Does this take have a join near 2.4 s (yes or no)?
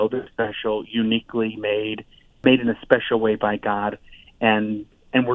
yes